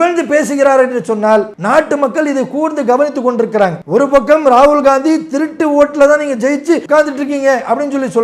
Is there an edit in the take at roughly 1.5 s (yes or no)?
yes